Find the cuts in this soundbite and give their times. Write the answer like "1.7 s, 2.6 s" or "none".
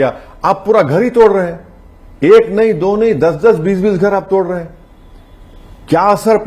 none